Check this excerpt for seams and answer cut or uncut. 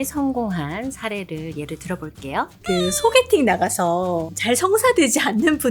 cut